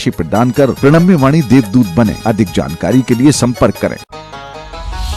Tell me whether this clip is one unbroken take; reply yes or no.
no